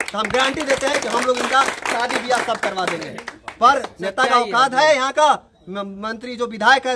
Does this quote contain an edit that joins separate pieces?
no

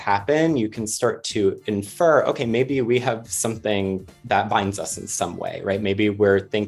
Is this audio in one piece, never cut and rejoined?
yes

